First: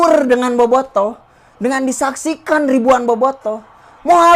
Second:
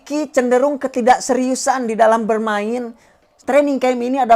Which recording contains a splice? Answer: second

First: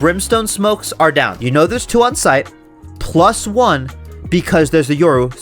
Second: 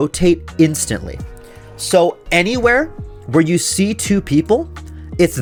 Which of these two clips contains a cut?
first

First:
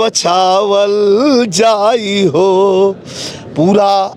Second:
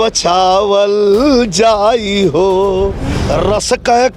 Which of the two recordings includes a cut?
second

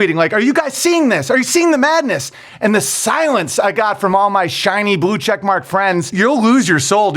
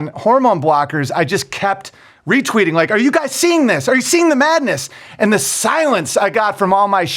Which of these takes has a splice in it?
first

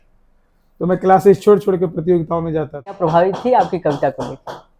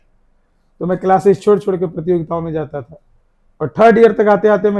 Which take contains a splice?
first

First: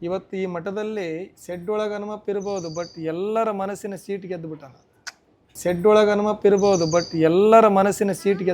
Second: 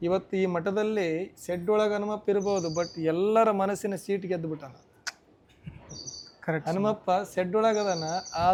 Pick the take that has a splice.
first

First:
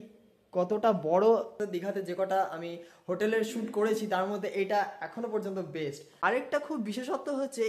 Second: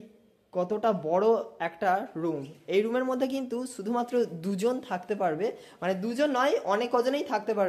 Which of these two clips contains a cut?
first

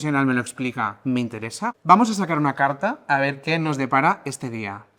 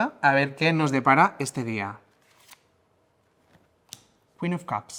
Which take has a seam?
first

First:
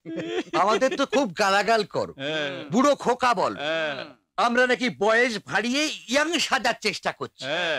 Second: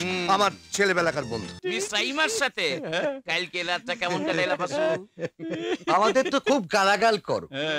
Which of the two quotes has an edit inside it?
second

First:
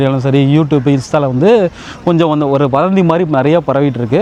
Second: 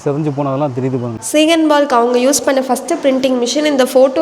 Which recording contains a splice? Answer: second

